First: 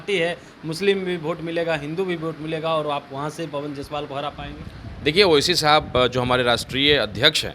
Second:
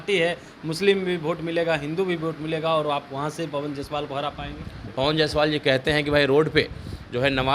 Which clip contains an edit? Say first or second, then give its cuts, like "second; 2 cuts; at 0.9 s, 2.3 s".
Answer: second; 1 cut; at 4.9 s